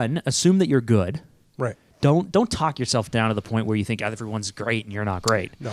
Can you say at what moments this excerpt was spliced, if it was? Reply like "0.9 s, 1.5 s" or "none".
none